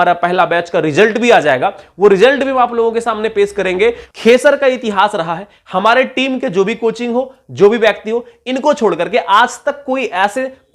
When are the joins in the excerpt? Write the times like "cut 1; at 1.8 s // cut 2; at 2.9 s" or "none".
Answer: cut 1; at 4.1 s